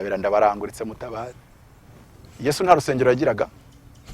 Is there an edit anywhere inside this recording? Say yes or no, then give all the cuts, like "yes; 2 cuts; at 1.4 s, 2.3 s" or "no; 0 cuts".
yes; 1 cut; at 1.4 s